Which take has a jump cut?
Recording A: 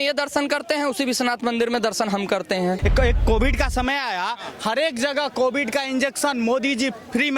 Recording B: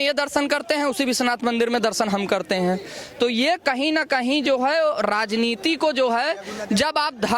A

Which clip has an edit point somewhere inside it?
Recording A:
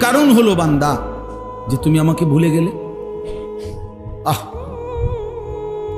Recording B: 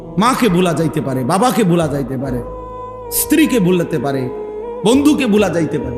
A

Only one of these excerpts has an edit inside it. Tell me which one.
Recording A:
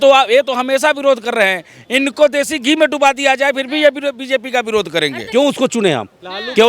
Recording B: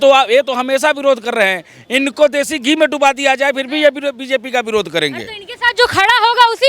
A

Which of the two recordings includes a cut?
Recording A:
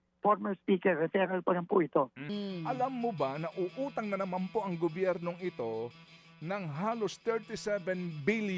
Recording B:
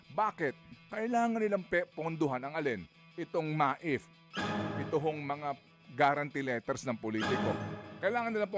A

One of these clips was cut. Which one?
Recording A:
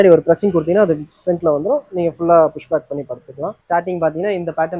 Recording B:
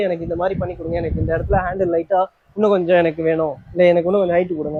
A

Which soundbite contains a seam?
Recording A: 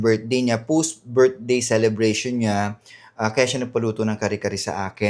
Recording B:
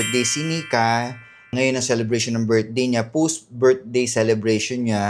B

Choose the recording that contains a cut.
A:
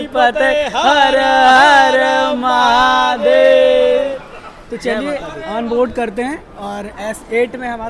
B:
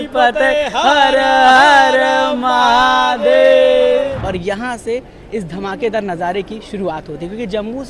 B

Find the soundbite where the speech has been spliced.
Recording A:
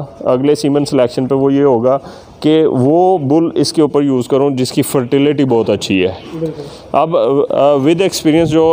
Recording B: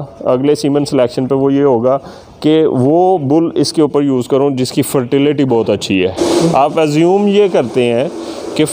B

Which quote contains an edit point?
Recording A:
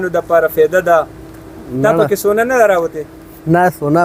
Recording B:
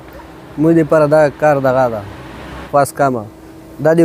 B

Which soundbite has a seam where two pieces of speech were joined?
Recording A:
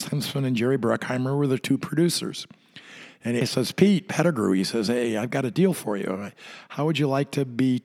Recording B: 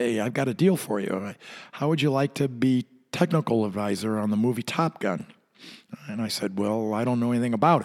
A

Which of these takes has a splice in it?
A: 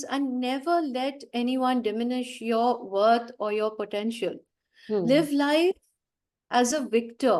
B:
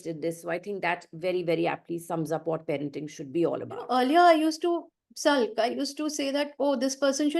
B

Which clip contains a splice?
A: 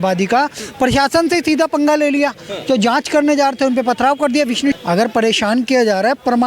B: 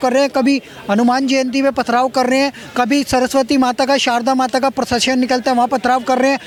A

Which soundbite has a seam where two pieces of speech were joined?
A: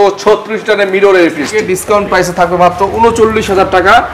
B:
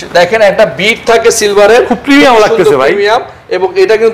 A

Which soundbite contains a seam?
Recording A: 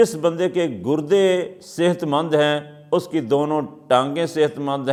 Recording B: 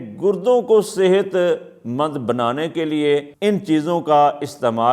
B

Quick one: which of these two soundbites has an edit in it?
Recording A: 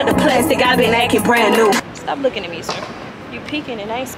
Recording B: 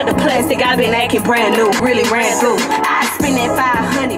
A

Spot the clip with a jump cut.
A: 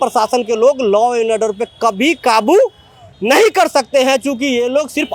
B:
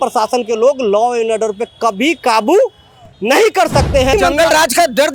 B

